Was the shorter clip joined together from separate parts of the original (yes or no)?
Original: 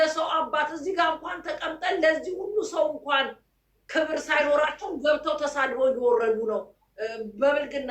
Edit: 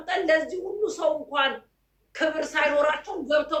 no